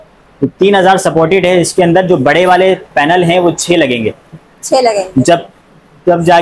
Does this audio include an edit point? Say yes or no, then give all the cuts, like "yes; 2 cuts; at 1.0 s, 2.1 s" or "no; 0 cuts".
no; 0 cuts